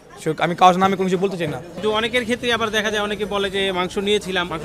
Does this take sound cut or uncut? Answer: cut